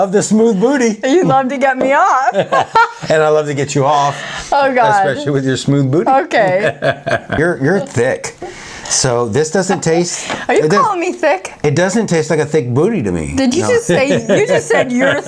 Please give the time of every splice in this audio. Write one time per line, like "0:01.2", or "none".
0:07.4